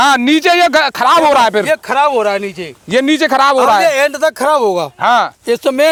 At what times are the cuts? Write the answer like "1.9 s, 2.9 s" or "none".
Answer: none